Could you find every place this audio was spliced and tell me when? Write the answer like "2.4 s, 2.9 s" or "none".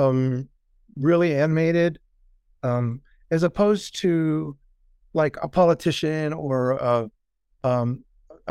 none